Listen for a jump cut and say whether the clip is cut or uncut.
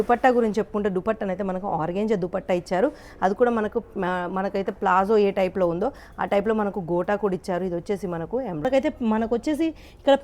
cut